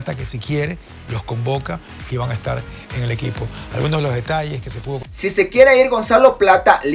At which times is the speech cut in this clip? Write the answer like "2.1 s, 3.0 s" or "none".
5.1 s